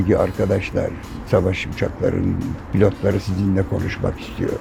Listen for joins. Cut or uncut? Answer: uncut